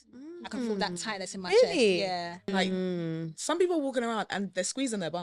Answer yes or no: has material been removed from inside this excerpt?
yes